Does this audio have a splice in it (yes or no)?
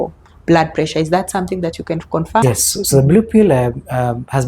yes